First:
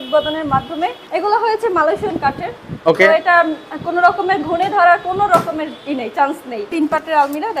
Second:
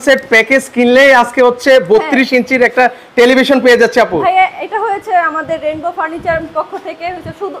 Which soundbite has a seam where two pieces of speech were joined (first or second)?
first